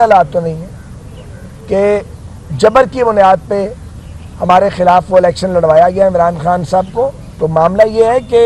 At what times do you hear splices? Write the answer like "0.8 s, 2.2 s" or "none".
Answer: 7.2 s